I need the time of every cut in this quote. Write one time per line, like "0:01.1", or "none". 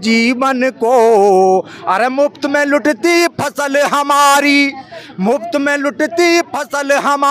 none